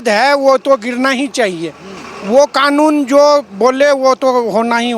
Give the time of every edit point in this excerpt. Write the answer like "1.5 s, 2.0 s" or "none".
none